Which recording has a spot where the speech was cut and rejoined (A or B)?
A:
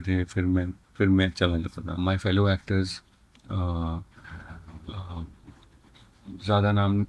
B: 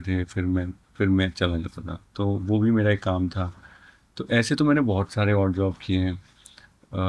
A